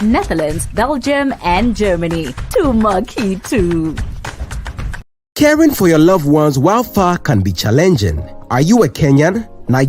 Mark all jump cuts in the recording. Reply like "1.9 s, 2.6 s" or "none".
5.2 s